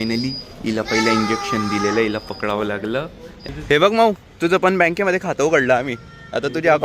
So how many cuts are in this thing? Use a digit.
1